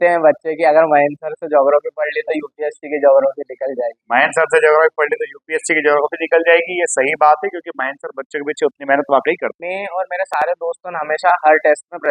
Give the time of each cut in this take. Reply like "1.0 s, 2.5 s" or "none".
9.6 s

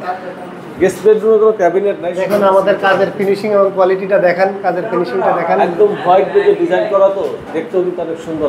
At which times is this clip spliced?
none

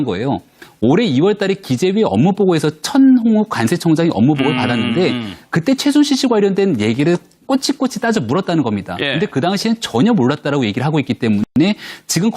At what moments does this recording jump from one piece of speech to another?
7.2 s

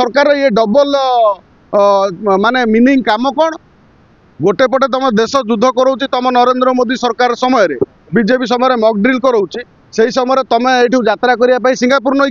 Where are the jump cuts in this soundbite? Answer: none

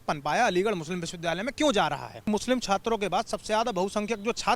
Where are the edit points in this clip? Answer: 2.3 s

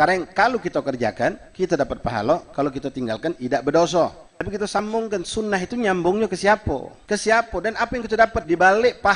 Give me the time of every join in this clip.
4.8 s, 6.9 s

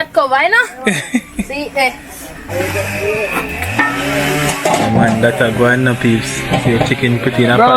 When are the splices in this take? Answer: 2.3 s

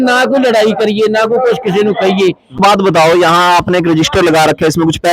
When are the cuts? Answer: 2.6 s

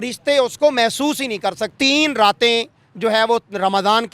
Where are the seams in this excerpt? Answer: 1.7 s

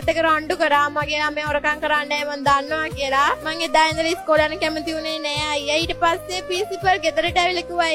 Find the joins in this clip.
none

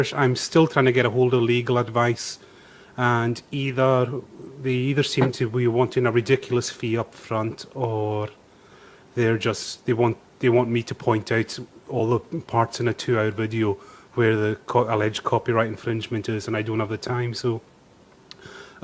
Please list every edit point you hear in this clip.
13.0 s

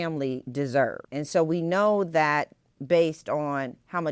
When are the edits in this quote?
1.0 s

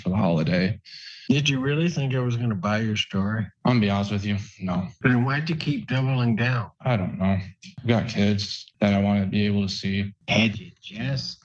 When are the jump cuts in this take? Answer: 0.8 s, 6.6 s, 7.7 s, 10.1 s

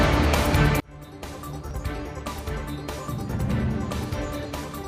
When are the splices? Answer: 3.0 s

